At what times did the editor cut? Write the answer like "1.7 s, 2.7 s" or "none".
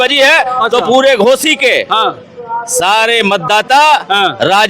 none

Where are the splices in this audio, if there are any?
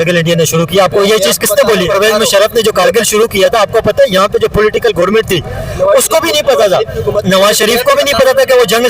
1.9 s

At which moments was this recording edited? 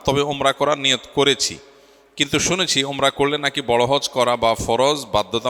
none

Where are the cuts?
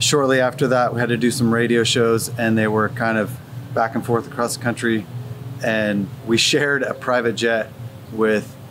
0.9 s

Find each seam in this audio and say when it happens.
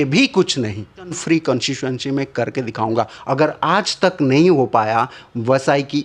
1.2 s

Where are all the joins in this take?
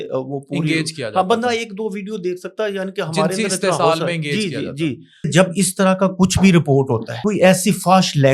5.3 s, 7.1 s

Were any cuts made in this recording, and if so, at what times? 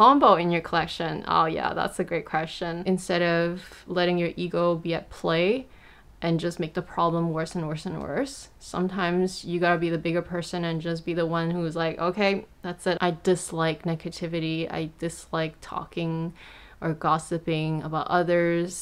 2.8 s, 13.0 s

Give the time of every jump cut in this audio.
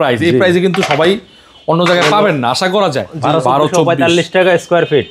3.1 s

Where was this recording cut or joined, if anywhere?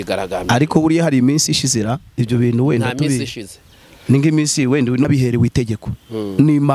5.0 s

